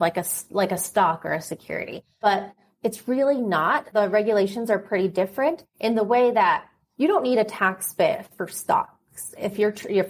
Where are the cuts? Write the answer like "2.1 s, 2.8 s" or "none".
2.2 s, 3.9 s